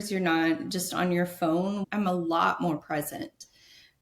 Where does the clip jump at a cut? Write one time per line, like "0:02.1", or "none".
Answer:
0:01.8